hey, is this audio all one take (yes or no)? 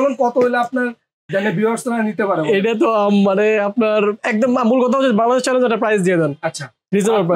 yes